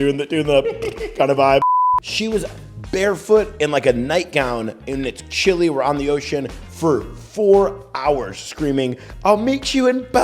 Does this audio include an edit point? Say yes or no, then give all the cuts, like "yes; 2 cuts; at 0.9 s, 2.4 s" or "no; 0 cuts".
yes; 1 cut; at 1.7 s